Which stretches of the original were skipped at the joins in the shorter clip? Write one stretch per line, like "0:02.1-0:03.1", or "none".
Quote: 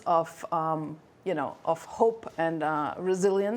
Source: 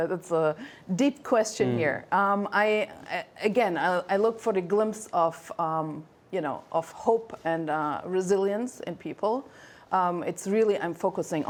none